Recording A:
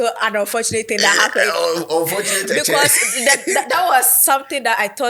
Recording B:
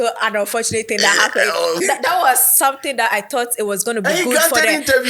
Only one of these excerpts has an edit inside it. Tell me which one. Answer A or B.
B